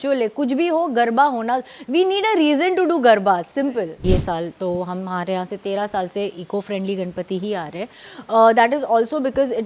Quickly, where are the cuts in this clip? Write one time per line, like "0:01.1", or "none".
0:04.0

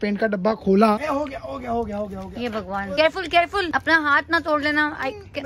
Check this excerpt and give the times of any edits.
0:01.0
0:02.9
0:03.7

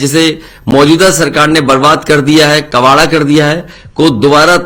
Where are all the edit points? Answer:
none

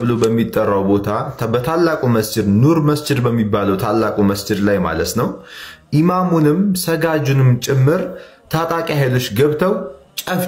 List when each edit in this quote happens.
none

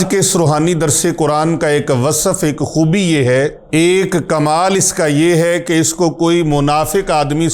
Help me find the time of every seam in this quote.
0:03.6

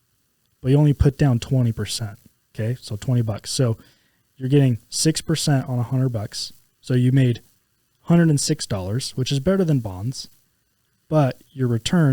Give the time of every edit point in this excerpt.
none

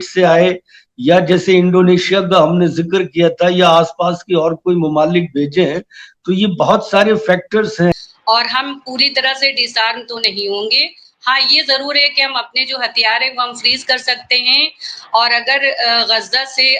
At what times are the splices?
0:07.9

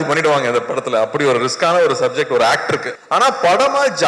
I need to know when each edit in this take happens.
0:02.9

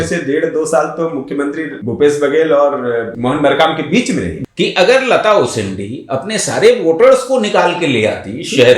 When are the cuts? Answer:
0:01.7
0:03.1
0:04.4

